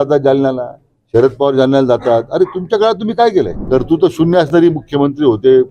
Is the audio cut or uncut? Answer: cut